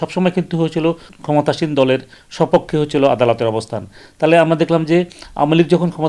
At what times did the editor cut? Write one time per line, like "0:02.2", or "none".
0:01.1